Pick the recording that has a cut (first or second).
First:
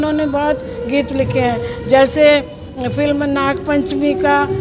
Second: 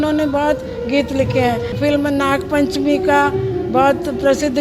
second